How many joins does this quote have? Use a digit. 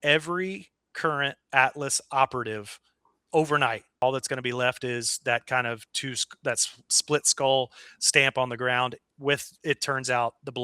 1